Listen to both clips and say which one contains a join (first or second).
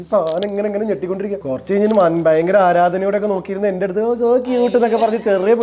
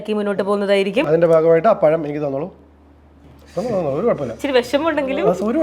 first